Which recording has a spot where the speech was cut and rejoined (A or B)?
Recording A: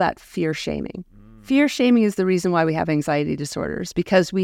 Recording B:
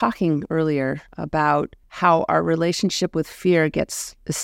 B